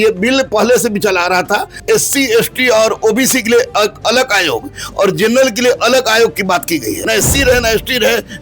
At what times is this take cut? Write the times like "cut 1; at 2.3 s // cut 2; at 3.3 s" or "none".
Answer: cut 1; at 1.7 s // cut 2; at 7.0 s